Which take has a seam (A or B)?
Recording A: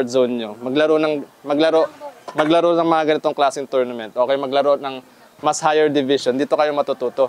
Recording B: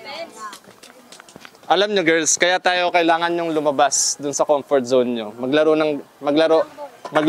B